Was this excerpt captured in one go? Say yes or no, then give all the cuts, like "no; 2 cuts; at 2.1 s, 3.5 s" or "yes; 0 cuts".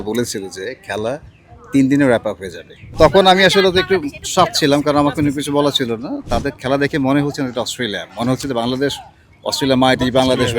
no; 2 cuts; at 2.8 s, 6.2 s